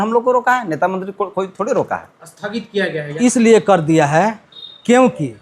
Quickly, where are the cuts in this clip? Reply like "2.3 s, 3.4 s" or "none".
3.1 s